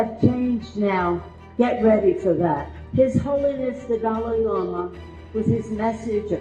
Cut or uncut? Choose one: cut